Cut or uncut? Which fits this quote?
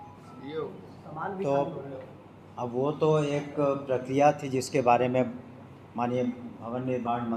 uncut